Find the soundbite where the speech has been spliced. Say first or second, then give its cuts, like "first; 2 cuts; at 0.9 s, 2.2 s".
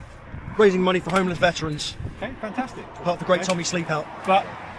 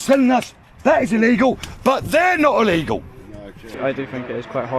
second; 1 cut; at 3.8 s